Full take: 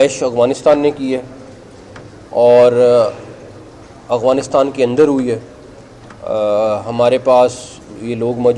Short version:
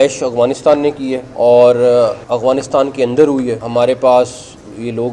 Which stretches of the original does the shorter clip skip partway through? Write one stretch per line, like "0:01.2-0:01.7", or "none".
0:01.2-0:02.2
0:03.2-0:04.0
0:05.4-0:06.9